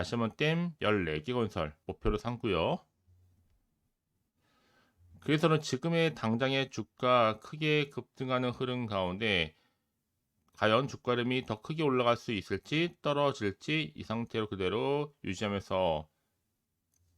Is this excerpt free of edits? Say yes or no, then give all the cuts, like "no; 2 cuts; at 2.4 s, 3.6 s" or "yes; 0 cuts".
no; 1 cut; at 1.8 s